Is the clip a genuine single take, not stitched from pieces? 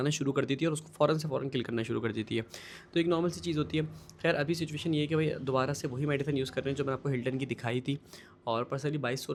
yes; 0 cuts

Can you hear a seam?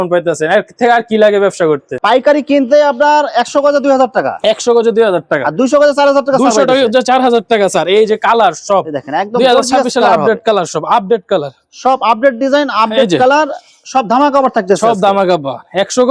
no; 0 cuts

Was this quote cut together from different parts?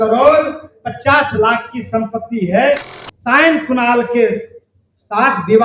yes; 1 cut; at 2.9 s

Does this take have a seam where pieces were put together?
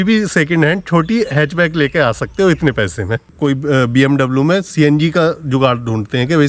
yes; 1 cut; at 3.2 s

